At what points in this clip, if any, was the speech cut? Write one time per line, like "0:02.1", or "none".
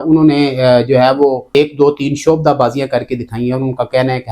0:01.4